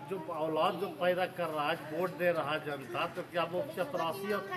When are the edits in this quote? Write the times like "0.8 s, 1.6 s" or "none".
none